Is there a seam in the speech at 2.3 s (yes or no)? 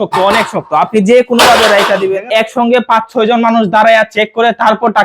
yes